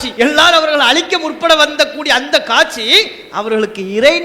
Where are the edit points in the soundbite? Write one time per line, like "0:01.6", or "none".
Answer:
none